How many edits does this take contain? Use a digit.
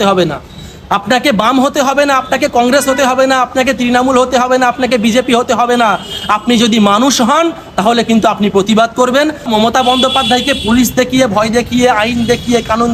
1